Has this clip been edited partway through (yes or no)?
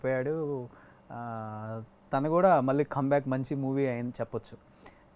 no